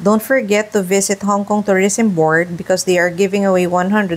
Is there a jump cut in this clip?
no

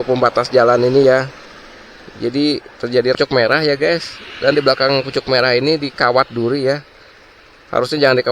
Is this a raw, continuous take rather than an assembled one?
no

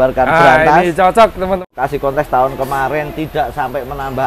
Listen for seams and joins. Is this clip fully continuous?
no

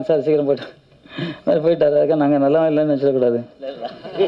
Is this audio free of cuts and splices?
yes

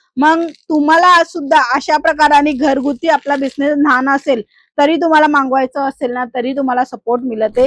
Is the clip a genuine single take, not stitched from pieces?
yes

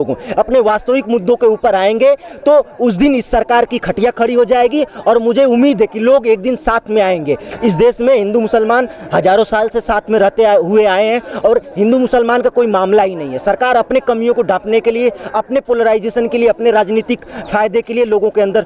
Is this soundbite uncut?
yes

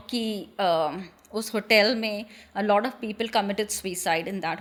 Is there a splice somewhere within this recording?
no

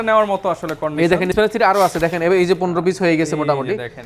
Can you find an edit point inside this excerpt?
no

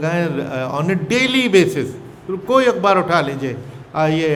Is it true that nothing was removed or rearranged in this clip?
yes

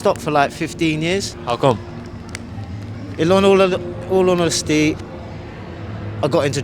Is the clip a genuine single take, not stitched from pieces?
no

